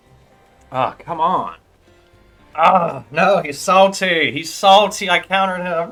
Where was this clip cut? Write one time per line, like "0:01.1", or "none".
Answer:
none